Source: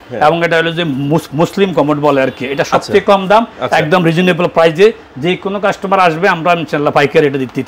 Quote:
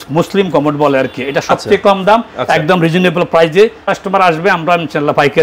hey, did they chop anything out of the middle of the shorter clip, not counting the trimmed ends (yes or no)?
yes